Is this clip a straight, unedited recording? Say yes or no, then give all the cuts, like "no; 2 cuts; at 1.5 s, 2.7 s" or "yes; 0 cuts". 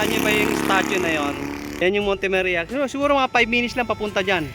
no; 1 cut; at 1.8 s